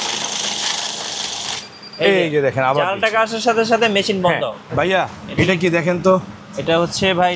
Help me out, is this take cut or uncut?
cut